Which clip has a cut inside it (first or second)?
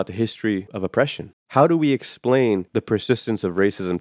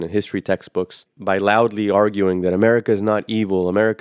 first